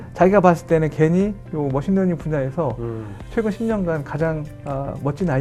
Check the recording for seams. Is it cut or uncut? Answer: uncut